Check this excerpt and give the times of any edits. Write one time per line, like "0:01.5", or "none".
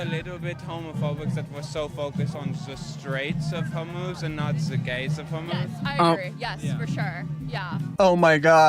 none